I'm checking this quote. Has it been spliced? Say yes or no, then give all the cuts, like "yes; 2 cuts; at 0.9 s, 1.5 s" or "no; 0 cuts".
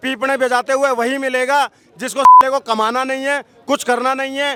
no; 0 cuts